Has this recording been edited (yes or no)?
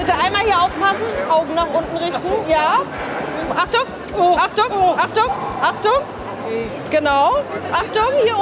yes